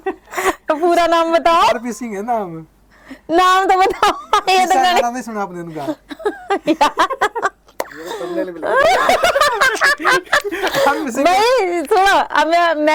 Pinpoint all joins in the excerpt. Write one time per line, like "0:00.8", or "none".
none